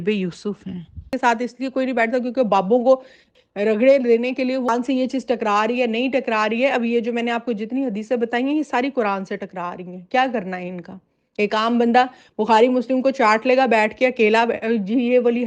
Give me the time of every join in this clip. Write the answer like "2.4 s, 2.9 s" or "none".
1.1 s, 4.7 s